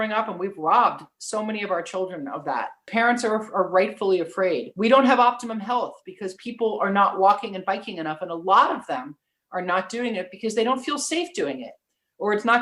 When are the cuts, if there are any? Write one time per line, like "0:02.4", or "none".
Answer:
0:02.9
0:04.7